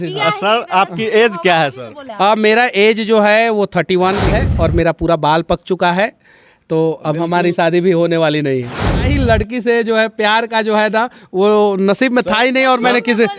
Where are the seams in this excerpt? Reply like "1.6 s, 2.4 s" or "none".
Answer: 4.4 s, 9.1 s